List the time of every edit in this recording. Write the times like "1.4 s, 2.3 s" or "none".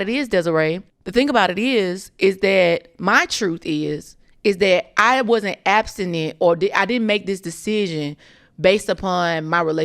0.9 s